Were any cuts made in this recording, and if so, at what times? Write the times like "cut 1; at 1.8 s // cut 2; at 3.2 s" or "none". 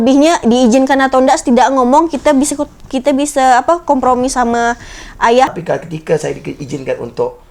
cut 1; at 5.5 s